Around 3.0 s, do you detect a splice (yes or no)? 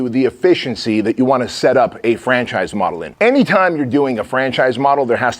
yes